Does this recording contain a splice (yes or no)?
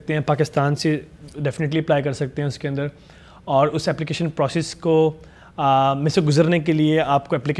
no